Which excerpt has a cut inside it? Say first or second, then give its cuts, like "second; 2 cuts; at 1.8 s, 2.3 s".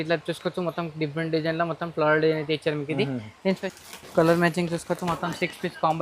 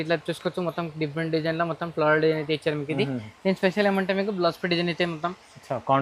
first; 1 cut; at 3.6 s